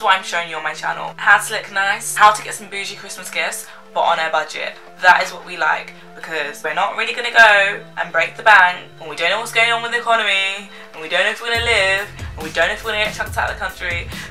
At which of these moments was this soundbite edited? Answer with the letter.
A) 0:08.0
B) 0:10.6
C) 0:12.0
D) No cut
D